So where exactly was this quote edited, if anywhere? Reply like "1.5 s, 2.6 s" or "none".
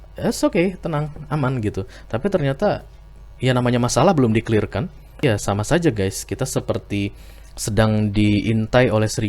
5.2 s

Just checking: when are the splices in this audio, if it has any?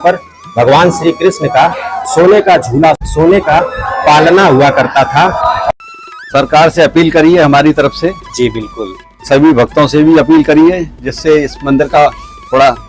3.0 s, 5.7 s

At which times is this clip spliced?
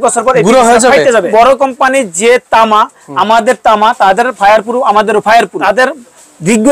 1.3 s, 5.6 s

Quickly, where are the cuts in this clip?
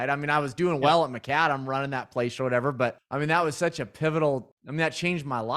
3.0 s, 4.6 s

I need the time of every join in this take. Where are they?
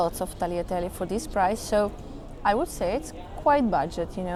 none

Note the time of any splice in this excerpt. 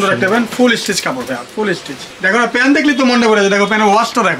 2.1 s

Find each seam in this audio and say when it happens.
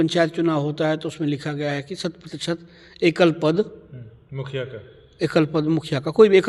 none

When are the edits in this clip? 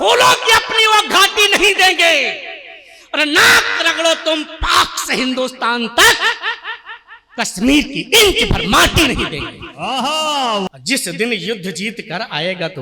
10.7 s

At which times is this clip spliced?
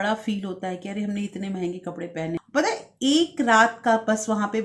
2.4 s

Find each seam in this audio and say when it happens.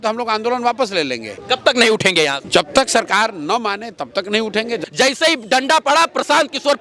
1.3 s, 2.4 s, 4.8 s

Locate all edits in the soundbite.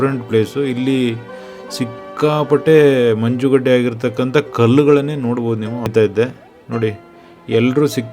5.9 s

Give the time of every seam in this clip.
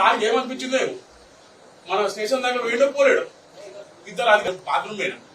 4.4 s

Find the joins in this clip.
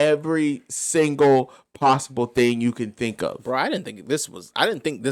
none

